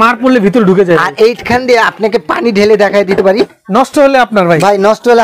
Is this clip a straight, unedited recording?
no; 1 cut; at 3.6 s

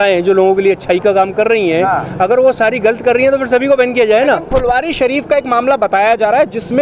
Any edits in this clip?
no; 0 cuts

